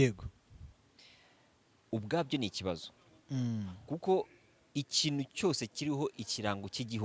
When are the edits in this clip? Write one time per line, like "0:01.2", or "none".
none